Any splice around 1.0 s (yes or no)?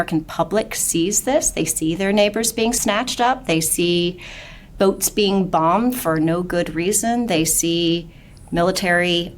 no